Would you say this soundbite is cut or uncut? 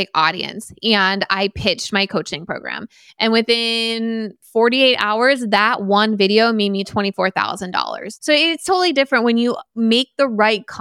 cut